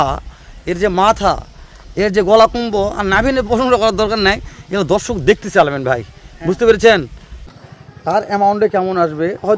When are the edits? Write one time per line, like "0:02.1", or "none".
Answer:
0:07.5